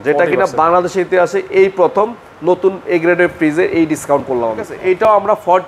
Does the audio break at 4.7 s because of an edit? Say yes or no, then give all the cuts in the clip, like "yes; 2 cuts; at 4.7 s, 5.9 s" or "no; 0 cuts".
yes; 1 cut; at 4.7 s